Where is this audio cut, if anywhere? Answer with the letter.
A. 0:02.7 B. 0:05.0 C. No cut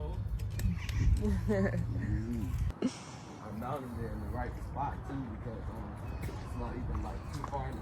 A